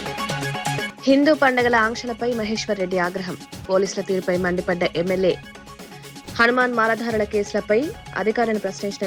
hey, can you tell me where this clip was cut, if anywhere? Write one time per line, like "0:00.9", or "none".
0:00.9